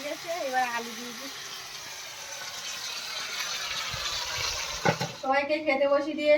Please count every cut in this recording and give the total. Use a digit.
1